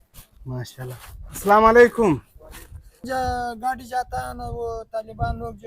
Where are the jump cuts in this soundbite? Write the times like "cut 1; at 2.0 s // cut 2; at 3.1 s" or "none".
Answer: cut 1; at 3.0 s